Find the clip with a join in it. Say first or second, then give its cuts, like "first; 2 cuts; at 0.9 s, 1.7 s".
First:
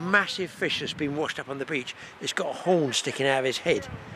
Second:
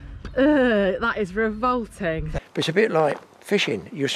second; 1 cut; at 2.3 s